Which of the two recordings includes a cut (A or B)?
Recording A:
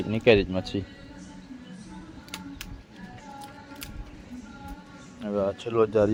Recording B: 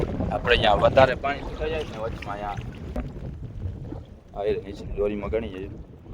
B